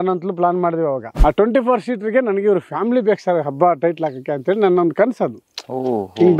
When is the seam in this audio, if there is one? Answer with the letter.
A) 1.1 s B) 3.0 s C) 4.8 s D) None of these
A